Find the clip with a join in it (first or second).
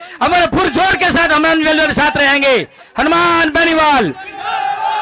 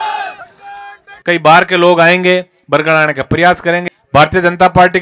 second